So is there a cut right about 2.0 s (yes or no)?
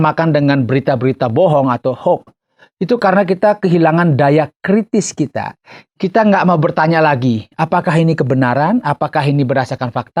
no